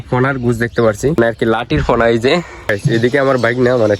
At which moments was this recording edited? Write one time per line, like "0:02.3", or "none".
0:01.2
0:02.7